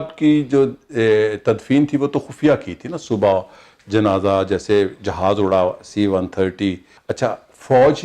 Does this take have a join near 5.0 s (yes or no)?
no